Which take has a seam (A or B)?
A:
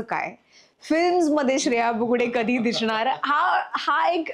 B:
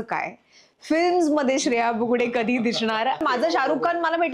B